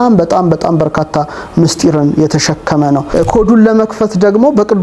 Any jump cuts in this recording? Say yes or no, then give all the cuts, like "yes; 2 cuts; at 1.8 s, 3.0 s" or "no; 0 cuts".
yes; 1 cut; at 3.1 s